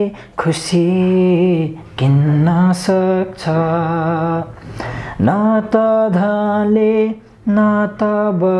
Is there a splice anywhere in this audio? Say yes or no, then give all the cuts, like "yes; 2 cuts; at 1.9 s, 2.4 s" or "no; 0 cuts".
no; 0 cuts